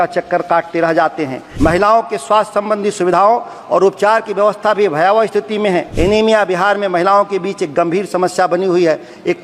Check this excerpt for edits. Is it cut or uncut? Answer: cut